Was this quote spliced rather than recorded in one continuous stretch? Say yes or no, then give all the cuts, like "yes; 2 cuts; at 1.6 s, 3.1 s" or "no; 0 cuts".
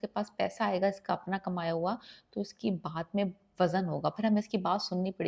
no; 0 cuts